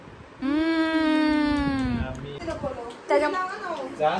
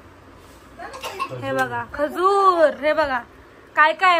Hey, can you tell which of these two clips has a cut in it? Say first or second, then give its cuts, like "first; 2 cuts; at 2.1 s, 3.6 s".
first; 1 cut; at 2.4 s